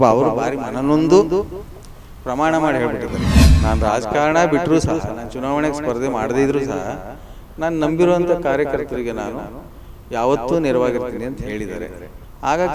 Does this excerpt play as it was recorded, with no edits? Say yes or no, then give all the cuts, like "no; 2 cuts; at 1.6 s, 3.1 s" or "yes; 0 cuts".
no; 1 cut; at 3.3 s